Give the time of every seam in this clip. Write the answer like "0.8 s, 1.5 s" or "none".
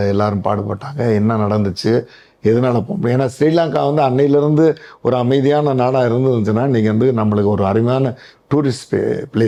none

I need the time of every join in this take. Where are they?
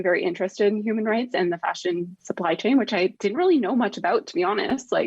2.2 s

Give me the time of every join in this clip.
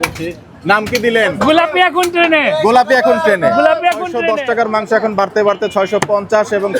4.2 s

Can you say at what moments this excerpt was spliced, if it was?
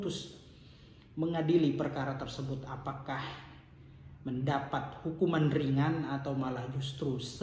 none

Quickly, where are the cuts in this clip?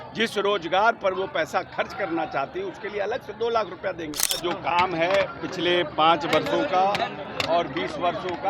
4.4 s

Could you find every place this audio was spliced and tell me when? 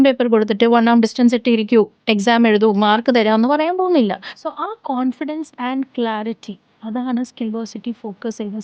4.3 s

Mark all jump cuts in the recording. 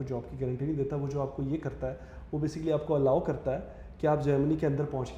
none

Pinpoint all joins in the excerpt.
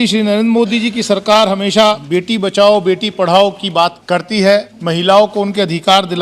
2.0 s, 4.0 s, 4.7 s

